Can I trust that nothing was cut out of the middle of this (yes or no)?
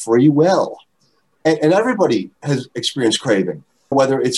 no